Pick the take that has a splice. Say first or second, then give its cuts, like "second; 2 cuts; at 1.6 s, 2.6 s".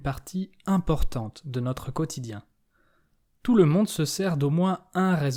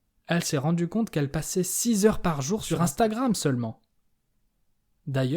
second; 1 cut; at 2.7 s